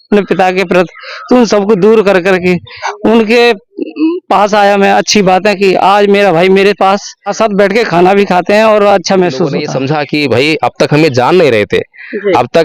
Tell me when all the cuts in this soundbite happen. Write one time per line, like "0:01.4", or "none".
0:07.3
0:09.7